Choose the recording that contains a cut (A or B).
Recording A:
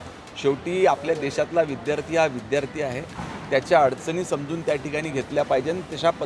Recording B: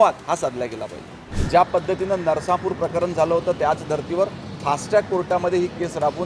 B